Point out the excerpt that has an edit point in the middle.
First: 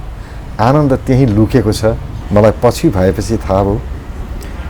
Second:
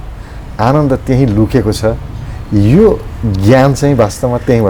first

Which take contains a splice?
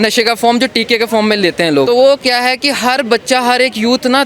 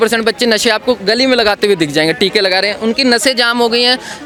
first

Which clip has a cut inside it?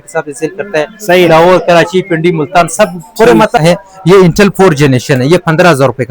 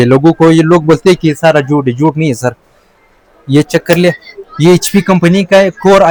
first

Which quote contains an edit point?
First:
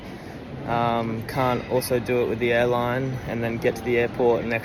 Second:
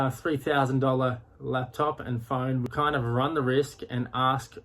second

